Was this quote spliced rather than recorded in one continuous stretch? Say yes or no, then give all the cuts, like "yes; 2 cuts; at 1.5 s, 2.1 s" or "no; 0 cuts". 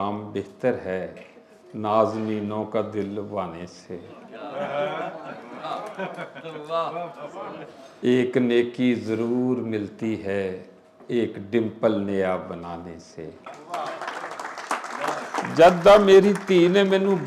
yes; 1 cut; at 13.5 s